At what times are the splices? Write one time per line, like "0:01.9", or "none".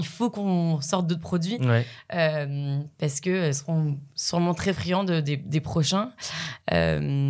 none